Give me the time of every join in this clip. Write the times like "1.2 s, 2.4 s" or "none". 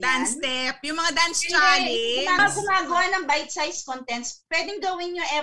2.4 s